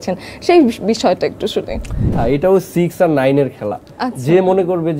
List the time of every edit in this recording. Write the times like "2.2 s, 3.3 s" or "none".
2.1 s